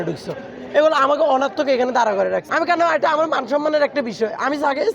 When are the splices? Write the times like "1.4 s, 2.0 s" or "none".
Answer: 2.5 s